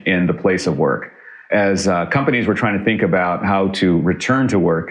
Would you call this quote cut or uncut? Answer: uncut